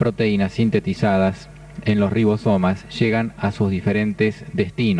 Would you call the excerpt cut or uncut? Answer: uncut